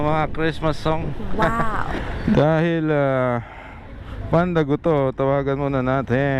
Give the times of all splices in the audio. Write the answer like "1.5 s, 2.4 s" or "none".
1.7 s